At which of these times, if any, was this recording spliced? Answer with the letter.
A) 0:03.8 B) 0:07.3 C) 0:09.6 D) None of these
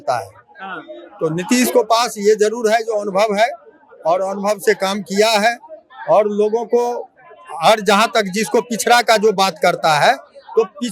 D